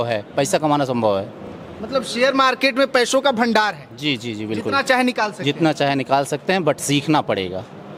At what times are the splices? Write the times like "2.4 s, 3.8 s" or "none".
none